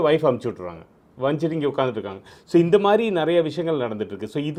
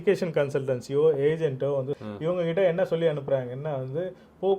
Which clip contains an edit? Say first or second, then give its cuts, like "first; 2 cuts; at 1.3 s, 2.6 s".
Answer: second; 1 cut; at 2.0 s